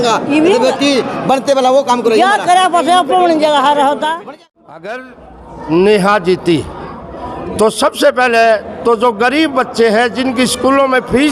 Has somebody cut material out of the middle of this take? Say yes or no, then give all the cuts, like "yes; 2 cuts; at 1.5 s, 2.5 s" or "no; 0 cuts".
yes; 1 cut; at 4.2 s